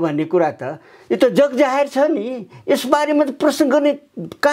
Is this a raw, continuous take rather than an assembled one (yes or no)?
yes